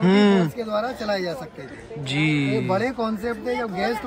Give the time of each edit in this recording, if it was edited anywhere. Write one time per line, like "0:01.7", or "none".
none